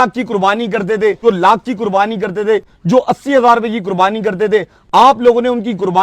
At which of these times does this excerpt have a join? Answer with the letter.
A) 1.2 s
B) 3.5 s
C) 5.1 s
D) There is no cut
A